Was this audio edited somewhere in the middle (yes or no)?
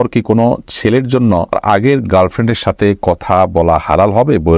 yes